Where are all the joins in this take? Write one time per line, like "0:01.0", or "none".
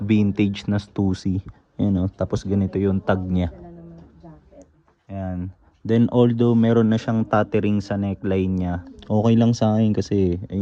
none